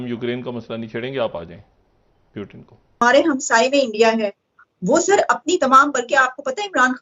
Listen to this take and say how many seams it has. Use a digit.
1